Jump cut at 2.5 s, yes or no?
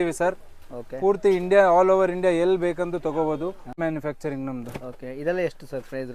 no